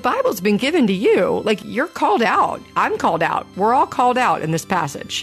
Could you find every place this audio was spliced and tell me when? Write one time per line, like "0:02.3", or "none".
0:01.6